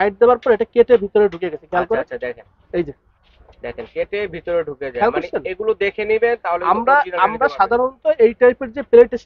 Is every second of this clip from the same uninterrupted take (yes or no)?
yes